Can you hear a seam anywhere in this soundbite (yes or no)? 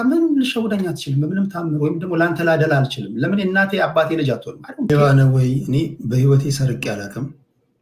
yes